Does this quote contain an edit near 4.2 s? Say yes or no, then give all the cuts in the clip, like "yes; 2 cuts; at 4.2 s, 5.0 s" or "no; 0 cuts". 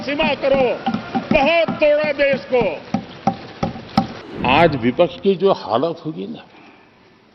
yes; 1 cut; at 4.2 s